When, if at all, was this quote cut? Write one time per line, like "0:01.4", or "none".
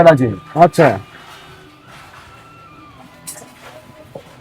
none